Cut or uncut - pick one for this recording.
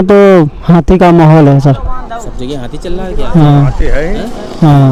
uncut